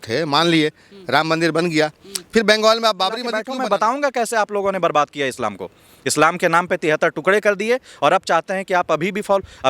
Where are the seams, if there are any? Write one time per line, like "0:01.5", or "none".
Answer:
0:03.4